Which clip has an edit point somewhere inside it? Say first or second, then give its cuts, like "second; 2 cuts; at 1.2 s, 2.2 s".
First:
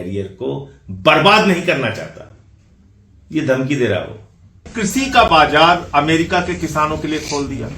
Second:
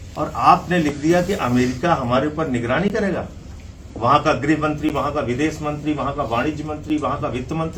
first; 1 cut; at 4.7 s